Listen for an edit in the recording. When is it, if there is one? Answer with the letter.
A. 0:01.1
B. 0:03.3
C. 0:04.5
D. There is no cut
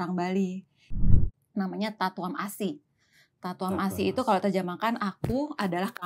A